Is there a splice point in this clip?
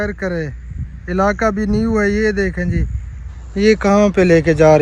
no; 0 cuts

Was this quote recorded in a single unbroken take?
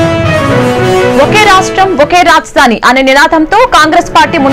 yes; 0 cuts

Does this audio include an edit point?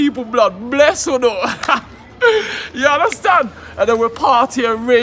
no; 0 cuts

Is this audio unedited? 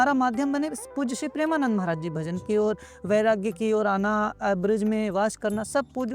yes; 0 cuts

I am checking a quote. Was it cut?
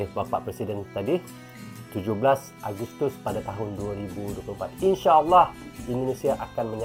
no; 0 cuts

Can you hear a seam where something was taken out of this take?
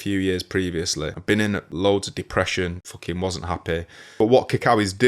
yes; 3 cuts; at 1.2 s, 2.9 s, 4.0 s

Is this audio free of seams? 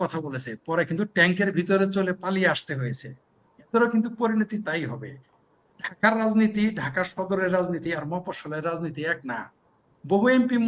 yes; 0 cuts

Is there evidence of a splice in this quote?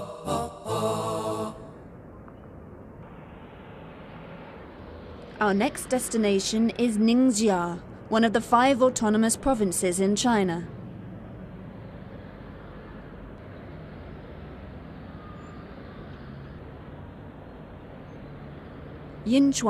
yes; 1 cut; at 1.0 s

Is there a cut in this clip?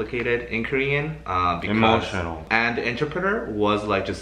yes; 1 cut; at 2.4 s

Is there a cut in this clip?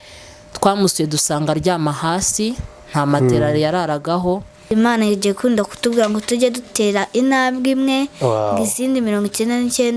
yes; 1 cut; at 4.7 s

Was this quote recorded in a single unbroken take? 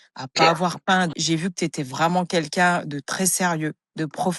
no; 1 cut; at 1.1 s

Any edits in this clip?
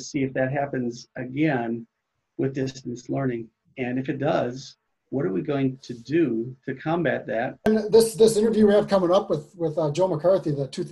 yes; 1 cut; at 7.7 s

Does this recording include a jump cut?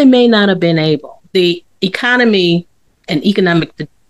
no; 0 cuts

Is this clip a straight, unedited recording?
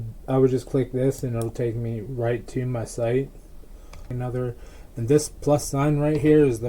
no; 1 cut; at 4.1 s

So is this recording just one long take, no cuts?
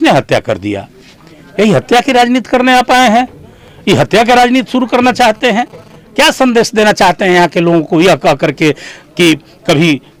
yes; 0 cuts

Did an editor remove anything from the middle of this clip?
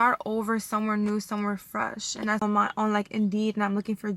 yes; 1 cut; at 2.4 s

